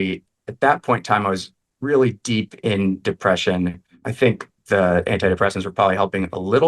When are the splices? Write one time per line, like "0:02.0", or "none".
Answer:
0:04.1